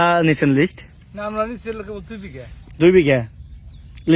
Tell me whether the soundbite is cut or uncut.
uncut